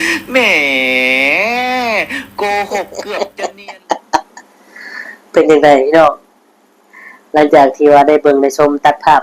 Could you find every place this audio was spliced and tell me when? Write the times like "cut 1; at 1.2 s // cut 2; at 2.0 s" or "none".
cut 1; at 3.1 s